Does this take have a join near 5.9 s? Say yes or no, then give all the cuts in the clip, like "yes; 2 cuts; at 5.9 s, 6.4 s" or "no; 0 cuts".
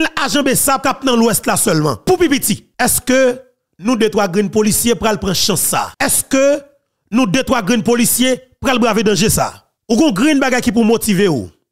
yes; 5 cuts; at 0.8 s, 2.0 s, 2.7 s, 5.9 s, 9.7 s